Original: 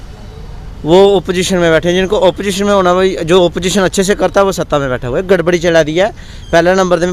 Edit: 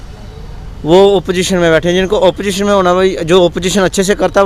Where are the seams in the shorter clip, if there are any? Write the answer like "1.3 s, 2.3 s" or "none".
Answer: none

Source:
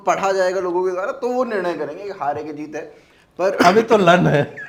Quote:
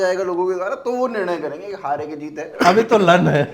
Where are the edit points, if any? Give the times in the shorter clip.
2.6 s

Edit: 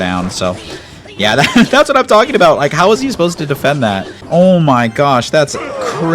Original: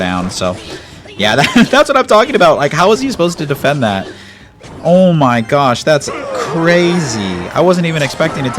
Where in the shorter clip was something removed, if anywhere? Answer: 4.1 s

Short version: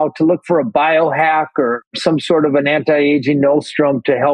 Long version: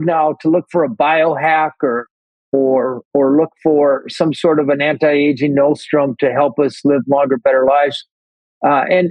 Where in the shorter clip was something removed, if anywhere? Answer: 1.9 s

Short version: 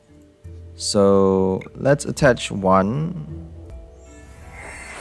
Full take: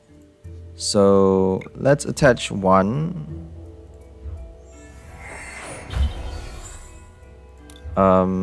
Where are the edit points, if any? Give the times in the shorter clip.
3.7 s

